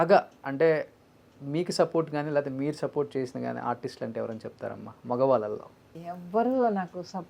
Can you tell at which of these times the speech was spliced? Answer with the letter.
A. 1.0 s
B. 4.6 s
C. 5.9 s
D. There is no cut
C